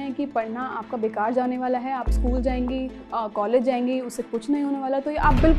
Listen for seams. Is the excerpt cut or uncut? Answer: uncut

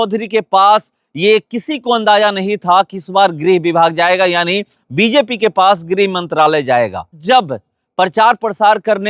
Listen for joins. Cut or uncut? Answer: cut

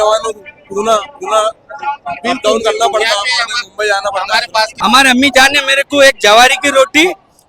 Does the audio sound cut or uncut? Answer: cut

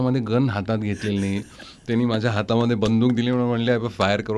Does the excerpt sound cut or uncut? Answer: uncut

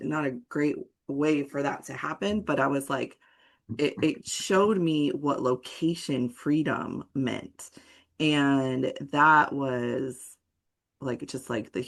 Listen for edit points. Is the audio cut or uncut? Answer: uncut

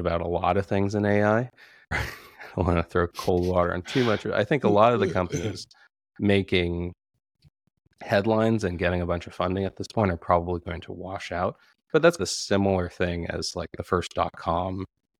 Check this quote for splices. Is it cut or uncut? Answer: cut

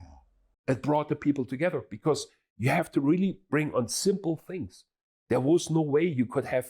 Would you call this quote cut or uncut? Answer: uncut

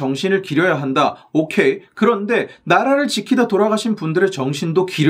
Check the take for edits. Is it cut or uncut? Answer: uncut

